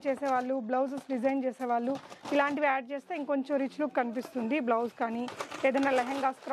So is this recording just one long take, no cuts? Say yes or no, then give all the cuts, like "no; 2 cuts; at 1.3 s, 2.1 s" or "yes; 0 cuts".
yes; 0 cuts